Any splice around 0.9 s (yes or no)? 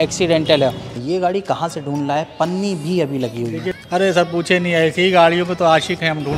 yes